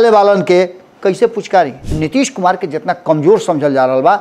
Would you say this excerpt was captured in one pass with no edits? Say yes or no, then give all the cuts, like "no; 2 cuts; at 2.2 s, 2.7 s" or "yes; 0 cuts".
no; 1 cut; at 1.8 s